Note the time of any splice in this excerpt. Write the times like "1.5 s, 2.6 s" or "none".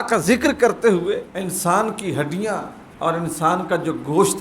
1.3 s, 2.8 s